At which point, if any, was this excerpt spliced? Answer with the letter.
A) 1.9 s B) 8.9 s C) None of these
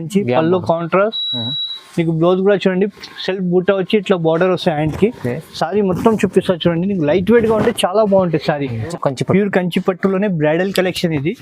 B